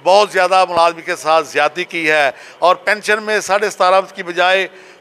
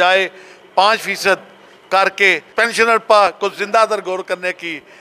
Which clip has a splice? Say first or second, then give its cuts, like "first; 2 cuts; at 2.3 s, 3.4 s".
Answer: second; 1 cut; at 2.4 s